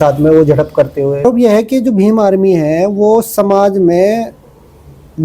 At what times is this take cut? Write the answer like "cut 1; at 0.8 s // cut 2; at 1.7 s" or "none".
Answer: cut 1; at 1.2 s